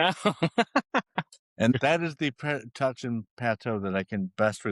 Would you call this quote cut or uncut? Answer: cut